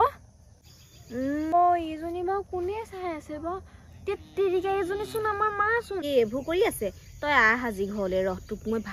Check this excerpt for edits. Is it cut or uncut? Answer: cut